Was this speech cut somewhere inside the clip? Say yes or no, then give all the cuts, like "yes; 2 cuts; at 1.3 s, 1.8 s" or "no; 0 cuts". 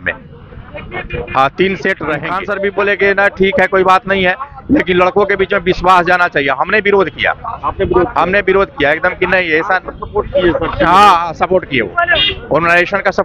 yes; 1 cut; at 2.4 s